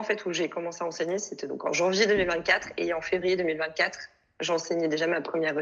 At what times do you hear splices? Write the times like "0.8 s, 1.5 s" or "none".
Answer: none

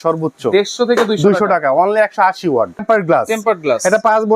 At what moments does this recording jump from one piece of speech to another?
2.8 s

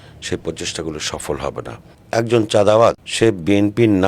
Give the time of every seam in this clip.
2.0 s, 3.1 s

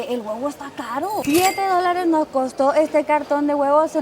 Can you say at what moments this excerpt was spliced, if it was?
1.2 s

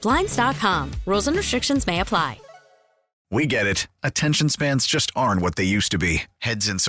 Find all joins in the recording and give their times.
3.2 s

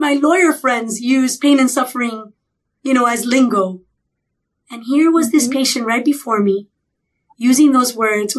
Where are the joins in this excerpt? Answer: none

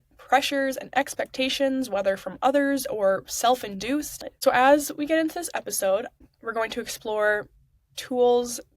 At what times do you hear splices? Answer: 4.2 s

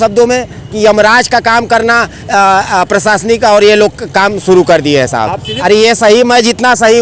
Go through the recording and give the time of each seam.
5.5 s

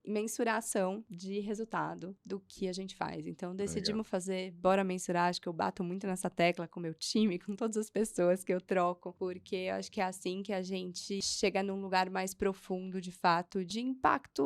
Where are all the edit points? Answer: 1.1 s, 2.1 s, 9.1 s, 11.2 s, 13.7 s

